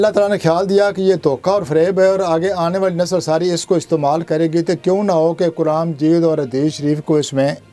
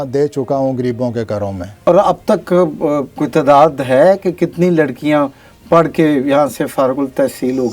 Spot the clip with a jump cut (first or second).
second